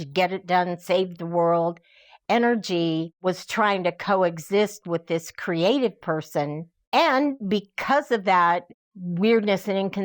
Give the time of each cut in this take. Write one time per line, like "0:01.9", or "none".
0:03.1